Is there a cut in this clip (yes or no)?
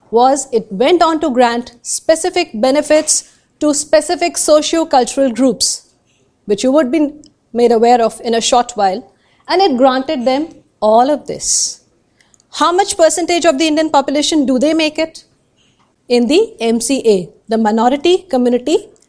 no